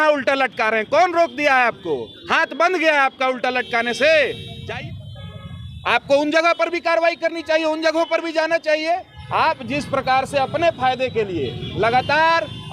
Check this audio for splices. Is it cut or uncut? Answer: cut